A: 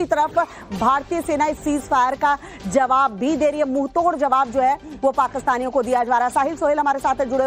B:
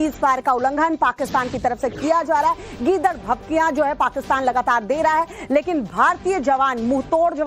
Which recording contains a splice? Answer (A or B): B